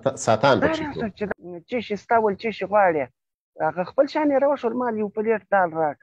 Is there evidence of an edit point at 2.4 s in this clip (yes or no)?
no